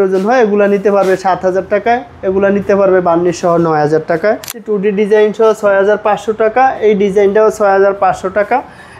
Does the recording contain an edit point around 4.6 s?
yes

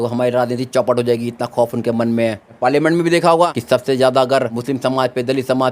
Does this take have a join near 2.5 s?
yes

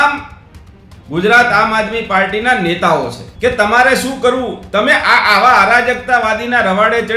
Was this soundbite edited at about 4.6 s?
no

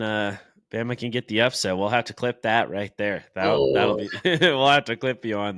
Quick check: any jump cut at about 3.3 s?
no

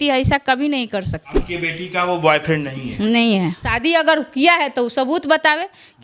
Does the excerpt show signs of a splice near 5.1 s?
no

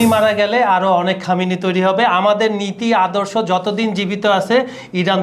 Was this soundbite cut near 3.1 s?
no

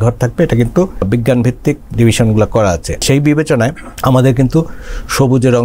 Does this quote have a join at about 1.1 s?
yes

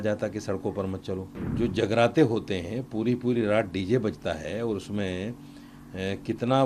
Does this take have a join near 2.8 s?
no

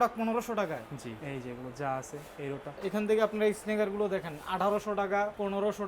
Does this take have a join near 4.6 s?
no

